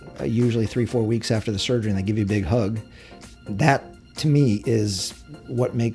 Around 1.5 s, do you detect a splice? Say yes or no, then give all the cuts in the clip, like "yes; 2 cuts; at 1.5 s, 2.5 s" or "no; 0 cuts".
no; 0 cuts